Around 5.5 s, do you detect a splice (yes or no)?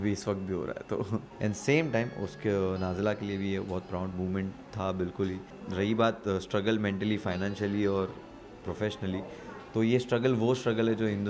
yes